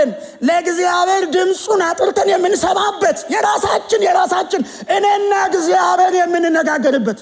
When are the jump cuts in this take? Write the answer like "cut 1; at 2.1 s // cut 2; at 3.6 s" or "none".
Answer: none